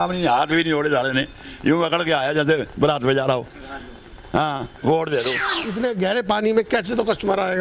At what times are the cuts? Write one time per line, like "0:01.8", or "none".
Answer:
0:05.6